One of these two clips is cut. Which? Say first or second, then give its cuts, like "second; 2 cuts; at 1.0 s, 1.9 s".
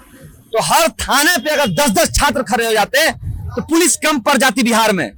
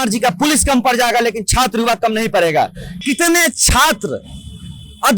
second; 1 cut; at 3.0 s